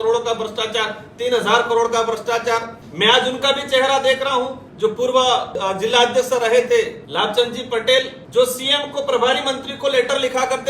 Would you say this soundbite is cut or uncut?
cut